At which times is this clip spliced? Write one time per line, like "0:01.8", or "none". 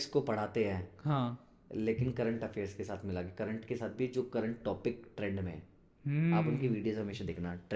none